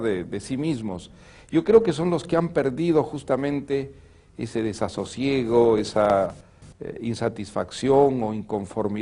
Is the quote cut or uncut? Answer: uncut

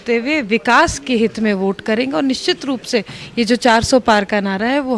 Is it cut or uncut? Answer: uncut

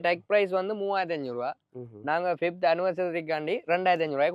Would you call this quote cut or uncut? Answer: uncut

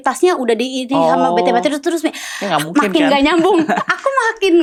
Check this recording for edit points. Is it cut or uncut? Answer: uncut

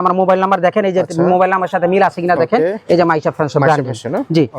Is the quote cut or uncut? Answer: uncut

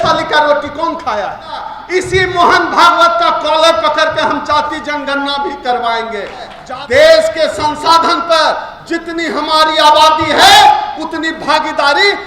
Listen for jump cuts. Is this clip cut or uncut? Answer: cut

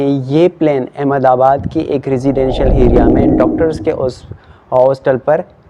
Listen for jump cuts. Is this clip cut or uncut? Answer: uncut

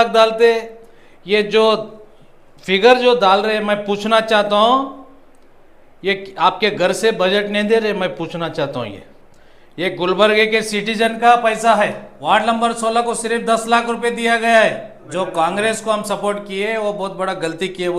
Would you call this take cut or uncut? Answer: cut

